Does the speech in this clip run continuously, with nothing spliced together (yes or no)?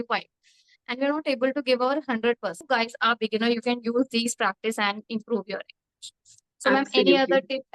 no